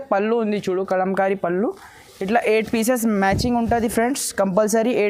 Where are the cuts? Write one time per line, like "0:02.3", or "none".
none